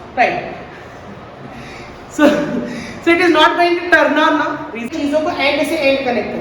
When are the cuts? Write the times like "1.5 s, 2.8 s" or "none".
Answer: 4.9 s